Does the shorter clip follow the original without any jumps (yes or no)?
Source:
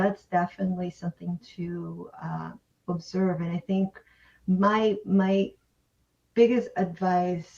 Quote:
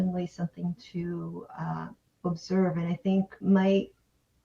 no